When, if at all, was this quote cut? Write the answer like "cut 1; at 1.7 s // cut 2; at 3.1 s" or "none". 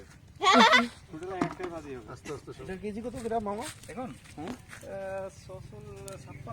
cut 1; at 2.5 s

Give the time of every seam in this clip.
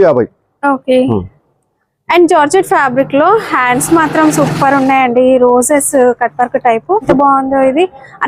cut 1; at 7.1 s

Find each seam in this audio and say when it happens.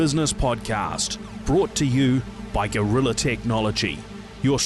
none

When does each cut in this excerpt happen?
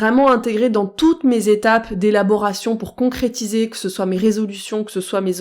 none

